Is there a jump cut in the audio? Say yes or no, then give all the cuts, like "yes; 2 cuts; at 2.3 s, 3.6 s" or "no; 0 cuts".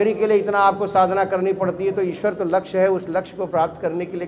no; 0 cuts